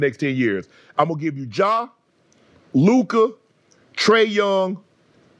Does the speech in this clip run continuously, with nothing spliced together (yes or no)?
yes